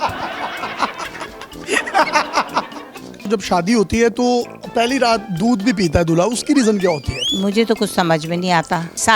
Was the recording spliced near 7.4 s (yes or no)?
no